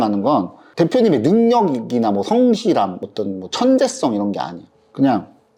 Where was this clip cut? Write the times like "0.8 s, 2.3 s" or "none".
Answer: none